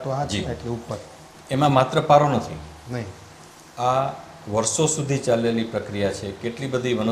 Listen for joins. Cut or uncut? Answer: uncut